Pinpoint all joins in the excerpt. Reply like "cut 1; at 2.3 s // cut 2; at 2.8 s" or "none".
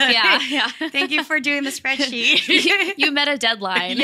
none